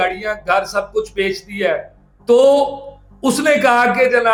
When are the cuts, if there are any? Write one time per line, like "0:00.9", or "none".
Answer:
none